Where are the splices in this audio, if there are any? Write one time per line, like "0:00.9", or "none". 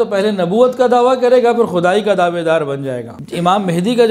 0:03.0